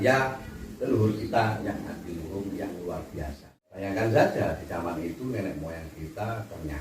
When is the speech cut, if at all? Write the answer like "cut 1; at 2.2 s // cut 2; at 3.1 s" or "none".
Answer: cut 1; at 3.8 s